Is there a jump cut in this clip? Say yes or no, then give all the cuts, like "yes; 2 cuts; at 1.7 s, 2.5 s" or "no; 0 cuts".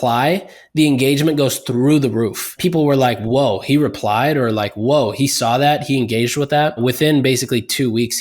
yes; 2 cuts; at 2.5 s, 6.8 s